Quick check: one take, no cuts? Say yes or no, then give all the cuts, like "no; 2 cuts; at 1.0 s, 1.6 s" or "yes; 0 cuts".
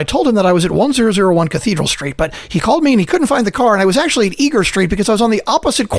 yes; 0 cuts